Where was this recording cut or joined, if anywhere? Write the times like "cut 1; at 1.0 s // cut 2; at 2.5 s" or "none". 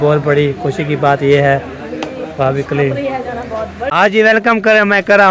cut 1; at 3.8 s

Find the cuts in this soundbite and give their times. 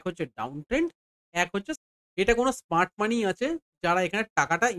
cut 1; at 1.8 s

